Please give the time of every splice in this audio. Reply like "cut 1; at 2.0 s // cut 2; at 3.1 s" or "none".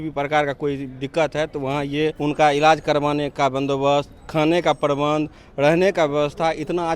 cut 1; at 2.2 s